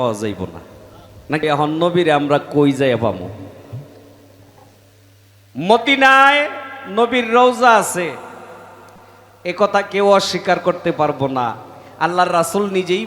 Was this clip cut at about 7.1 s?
no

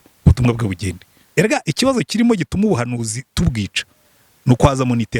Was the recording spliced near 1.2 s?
yes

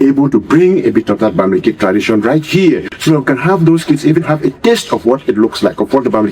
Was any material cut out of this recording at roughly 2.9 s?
yes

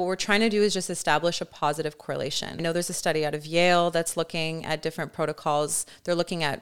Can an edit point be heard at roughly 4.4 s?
no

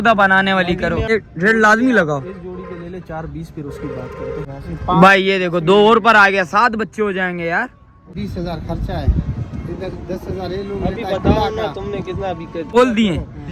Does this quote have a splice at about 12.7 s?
yes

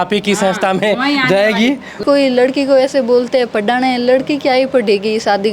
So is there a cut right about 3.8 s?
no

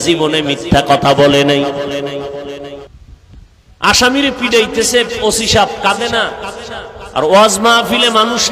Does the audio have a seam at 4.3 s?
no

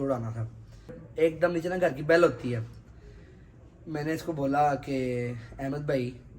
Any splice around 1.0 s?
yes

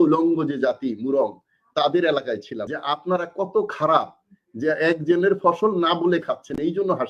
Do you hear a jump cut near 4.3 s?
no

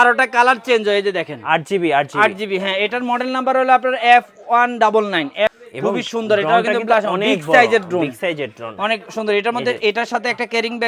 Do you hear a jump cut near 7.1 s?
no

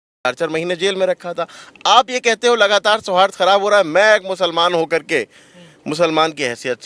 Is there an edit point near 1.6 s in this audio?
no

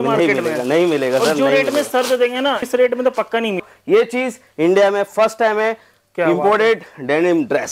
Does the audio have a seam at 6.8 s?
no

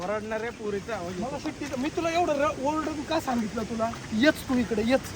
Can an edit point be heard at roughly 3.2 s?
no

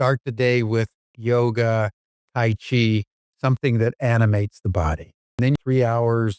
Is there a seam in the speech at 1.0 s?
yes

